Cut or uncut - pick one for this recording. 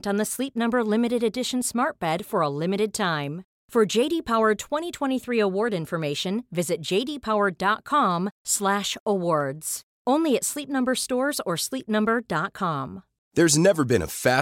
uncut